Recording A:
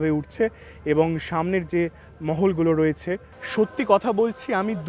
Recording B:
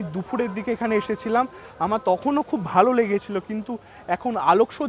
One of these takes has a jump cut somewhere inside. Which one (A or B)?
A